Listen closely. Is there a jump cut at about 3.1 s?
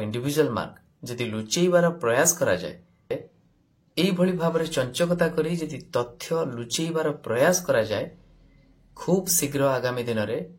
yes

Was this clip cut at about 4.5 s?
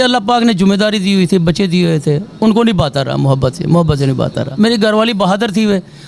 yes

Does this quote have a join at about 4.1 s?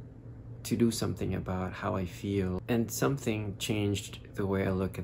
no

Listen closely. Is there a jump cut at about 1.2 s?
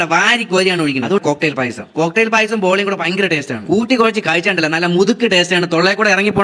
yes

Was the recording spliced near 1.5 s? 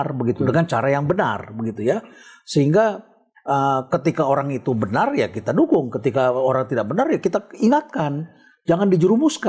no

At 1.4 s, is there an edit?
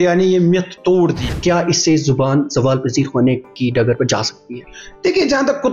yes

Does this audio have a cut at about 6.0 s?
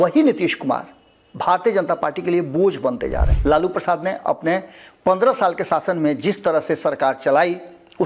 no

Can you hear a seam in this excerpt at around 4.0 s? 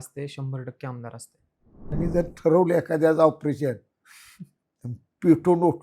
no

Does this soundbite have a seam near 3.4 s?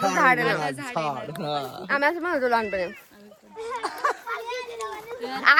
no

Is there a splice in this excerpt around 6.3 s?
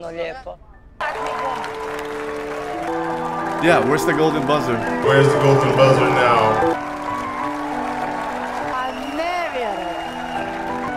no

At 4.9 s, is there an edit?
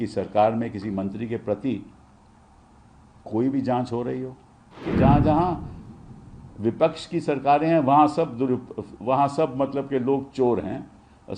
yes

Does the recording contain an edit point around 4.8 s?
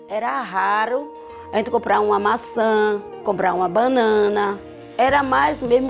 yes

